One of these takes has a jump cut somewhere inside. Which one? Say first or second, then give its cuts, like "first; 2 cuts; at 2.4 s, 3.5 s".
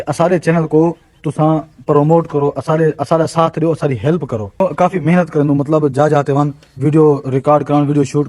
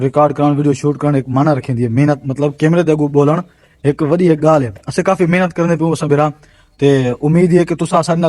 first; 1 cut; at 4.6 s